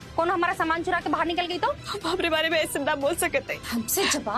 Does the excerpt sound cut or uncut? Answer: cut